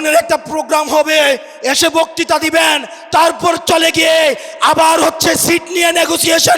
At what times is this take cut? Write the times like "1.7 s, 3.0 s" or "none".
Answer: none